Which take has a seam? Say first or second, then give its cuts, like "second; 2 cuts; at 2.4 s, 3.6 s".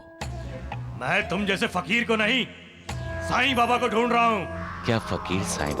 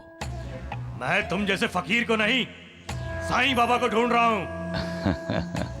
first; 1 cut; at 4.6 s